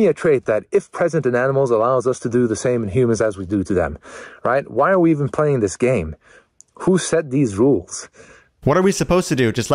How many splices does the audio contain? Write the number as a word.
one